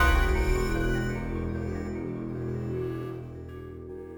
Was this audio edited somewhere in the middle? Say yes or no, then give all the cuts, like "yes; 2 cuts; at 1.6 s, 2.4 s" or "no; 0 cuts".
no; 0 cuts